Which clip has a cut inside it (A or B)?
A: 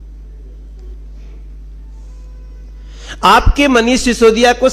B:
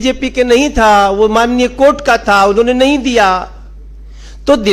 A